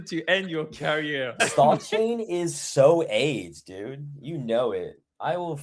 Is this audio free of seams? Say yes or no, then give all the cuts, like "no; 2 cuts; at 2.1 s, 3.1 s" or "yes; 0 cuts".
no; 1 cut; at 1.4 s